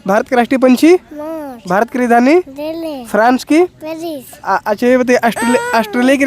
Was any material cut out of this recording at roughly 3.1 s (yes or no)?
no